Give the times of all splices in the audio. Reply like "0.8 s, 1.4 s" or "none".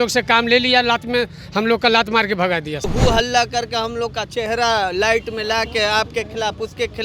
2.9 s

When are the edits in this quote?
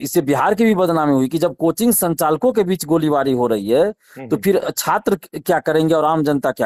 none

